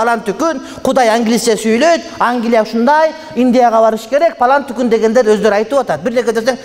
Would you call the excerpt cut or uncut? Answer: uncut